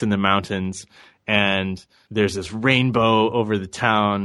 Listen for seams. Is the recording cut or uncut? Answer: cut